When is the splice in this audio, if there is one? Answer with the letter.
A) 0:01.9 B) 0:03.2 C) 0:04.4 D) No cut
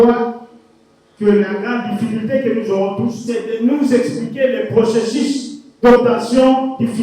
B